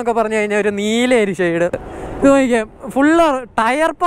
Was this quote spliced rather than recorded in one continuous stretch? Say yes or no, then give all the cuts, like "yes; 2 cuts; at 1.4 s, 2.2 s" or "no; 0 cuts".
yes; 1 cut; at 1.9 s